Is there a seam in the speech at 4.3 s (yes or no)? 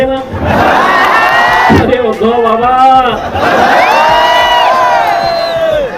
no